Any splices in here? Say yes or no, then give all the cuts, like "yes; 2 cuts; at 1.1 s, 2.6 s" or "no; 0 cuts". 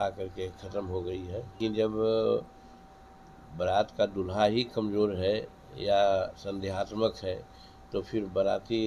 yes; 1 cut; at 1.6 s